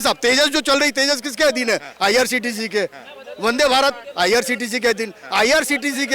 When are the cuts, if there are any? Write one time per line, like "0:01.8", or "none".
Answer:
none